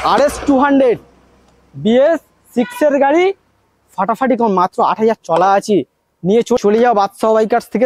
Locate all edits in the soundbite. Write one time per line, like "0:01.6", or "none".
0:06.6